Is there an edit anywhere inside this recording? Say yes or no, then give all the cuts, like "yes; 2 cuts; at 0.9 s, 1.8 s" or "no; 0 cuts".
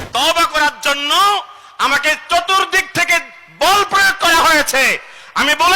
no; 0 cuts